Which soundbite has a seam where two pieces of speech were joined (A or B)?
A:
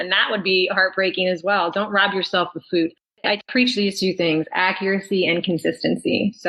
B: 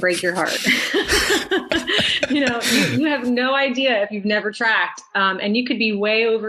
A